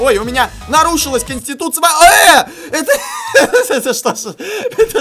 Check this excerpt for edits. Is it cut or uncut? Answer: uncut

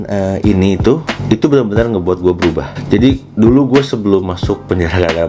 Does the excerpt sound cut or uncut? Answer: cut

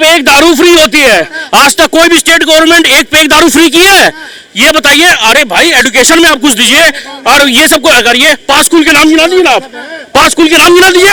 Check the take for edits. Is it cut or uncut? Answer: uncut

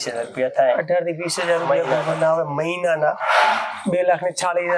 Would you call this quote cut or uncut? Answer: uncut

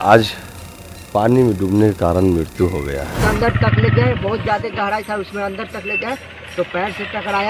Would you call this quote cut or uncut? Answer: cut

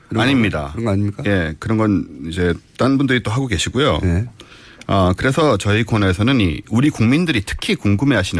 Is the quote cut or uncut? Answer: cut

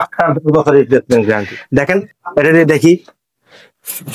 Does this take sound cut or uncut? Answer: cut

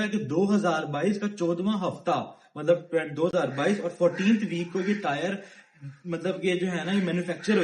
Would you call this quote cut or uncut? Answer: uncut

